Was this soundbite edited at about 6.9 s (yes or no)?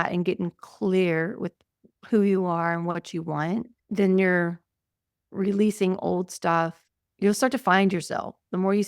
yes